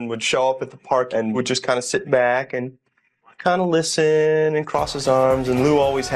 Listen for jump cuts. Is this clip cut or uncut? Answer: uncut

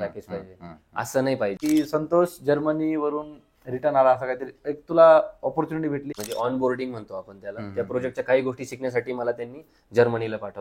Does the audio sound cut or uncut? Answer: cut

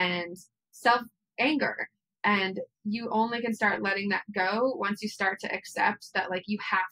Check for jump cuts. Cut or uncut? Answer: uncut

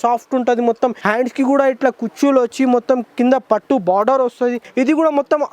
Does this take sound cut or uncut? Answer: cut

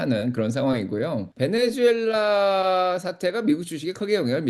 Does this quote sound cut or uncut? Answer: cut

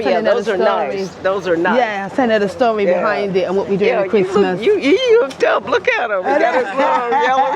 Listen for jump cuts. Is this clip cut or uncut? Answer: uncut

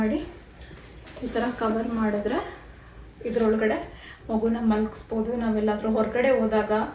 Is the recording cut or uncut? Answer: uncut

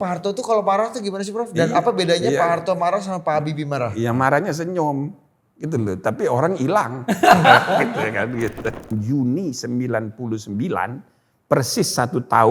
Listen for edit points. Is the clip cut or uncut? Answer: cut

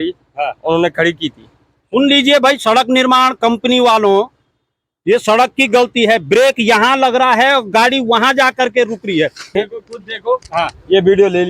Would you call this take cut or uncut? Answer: cut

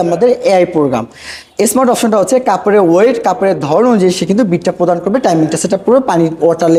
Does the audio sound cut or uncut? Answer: uncut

